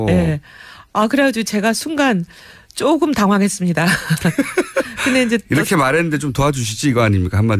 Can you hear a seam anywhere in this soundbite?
yes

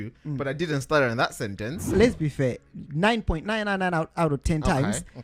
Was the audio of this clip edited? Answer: yes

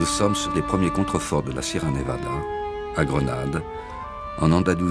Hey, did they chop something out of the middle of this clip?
no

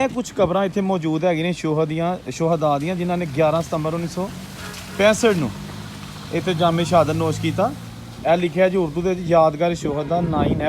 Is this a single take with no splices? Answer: yes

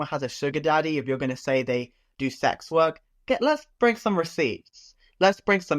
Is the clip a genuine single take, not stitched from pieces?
yes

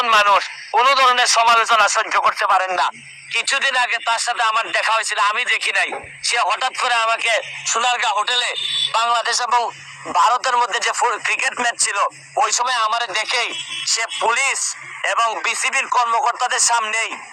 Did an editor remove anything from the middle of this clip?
no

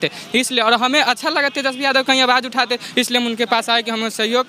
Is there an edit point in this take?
no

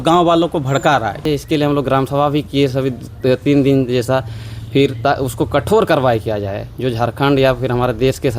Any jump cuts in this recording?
yes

